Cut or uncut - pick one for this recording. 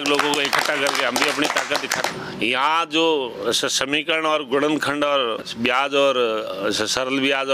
cut